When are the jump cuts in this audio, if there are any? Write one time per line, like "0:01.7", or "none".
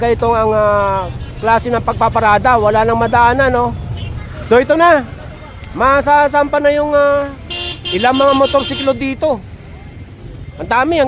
0:04.3